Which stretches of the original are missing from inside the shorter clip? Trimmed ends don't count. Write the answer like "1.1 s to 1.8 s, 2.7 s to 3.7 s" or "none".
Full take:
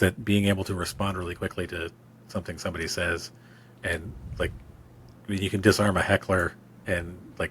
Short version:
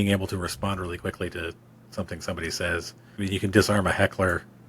3.4 s to 5.1 s